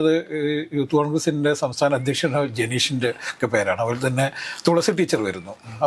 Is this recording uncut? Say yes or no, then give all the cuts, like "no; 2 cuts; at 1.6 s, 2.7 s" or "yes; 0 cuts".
yes; 0 cuts